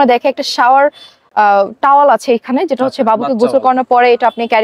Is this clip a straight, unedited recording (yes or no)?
yes